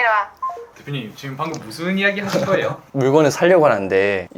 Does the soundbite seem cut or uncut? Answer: cut